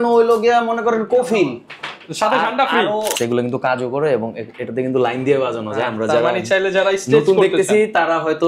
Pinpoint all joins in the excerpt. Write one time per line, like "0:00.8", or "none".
0:03.1

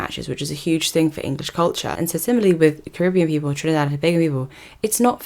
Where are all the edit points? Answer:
0:01.9

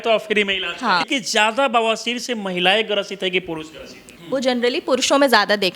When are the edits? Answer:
0:01.1
0:04.1

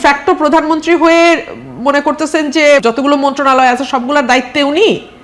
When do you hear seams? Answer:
0:02.8

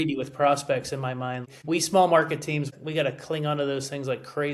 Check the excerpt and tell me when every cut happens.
0:01.5
0:02.7

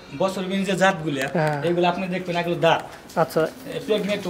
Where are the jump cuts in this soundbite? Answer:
none

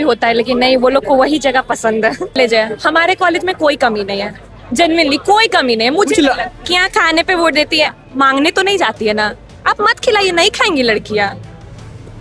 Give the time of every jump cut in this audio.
0:02.3
0:06.6

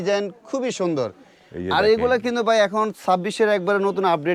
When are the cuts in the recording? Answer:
none

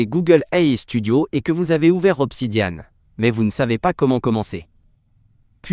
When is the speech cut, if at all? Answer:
none

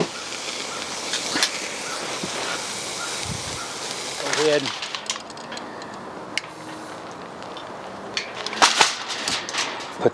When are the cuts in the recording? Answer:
0:04.3

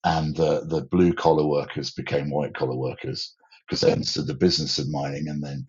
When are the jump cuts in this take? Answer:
none

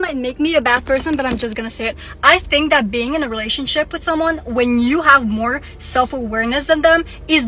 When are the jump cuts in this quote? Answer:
none

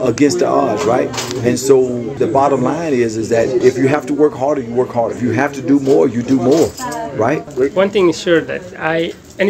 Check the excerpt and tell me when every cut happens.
0:02.2
0:03.6
0:05.2
0:07.5

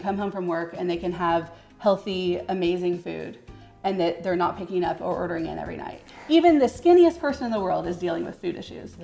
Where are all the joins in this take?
0:06.1

